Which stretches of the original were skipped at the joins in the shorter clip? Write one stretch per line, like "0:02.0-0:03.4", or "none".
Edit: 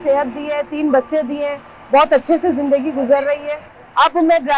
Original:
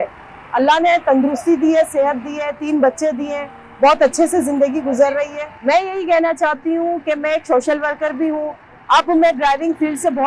0:05.5-0:08.6